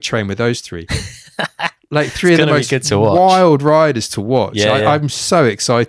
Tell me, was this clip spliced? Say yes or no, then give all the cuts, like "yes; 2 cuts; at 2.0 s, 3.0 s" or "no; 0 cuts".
no; 0 cuts